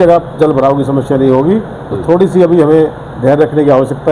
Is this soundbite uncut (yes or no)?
yes